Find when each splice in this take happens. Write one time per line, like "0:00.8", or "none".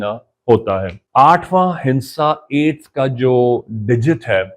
0:01.0